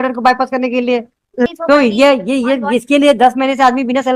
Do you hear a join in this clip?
yes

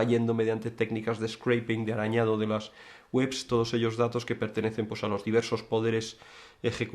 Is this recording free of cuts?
yes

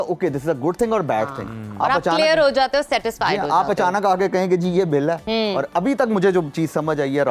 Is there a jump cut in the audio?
no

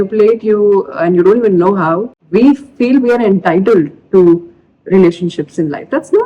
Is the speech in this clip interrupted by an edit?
yes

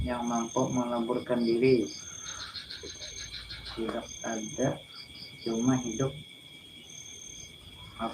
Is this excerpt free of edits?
no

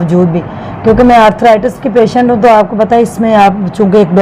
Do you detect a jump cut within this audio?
no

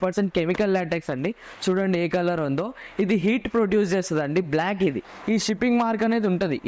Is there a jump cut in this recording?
yes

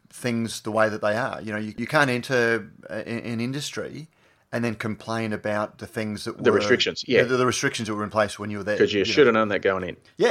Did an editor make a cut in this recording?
yes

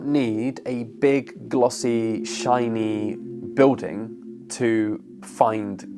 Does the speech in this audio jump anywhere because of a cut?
no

